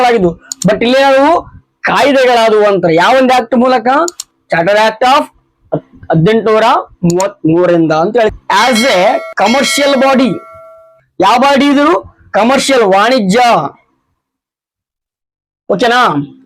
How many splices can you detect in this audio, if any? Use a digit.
1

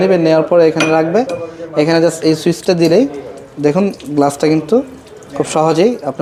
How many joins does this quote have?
0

